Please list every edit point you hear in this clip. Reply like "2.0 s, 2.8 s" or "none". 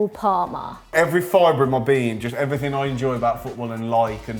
0.9 s